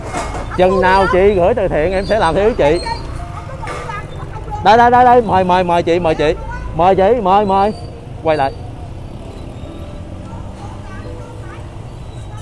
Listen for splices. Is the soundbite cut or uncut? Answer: uncut